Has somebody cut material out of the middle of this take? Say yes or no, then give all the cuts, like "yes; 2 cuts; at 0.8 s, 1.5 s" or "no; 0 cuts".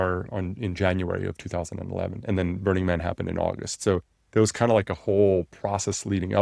no; 0 cuts